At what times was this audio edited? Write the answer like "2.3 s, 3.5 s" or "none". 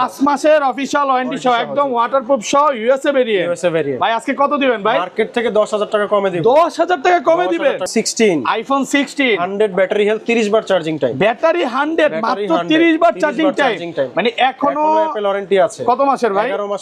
7.9 s